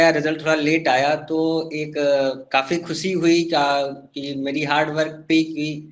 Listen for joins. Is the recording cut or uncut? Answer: uncut